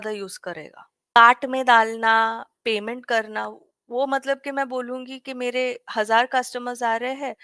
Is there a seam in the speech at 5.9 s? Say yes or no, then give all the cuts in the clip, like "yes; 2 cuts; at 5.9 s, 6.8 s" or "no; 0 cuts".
no; 1 cut; at 1.2 s